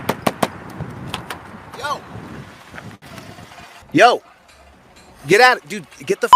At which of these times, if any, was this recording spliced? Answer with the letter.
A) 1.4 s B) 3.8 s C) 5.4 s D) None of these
B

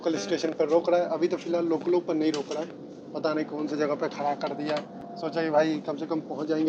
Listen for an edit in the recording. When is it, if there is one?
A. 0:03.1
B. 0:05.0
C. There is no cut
C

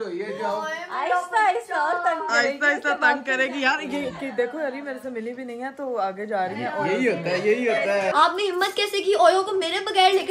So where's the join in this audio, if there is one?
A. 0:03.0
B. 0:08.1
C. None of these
B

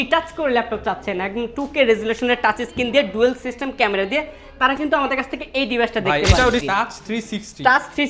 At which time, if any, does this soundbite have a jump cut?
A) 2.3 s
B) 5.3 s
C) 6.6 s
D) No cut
C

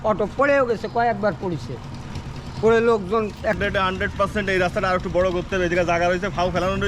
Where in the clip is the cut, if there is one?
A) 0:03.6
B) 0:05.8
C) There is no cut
A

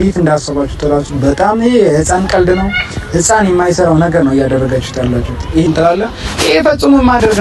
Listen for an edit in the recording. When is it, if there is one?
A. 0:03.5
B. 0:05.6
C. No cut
B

